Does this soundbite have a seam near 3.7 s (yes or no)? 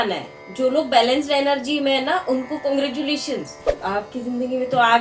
yes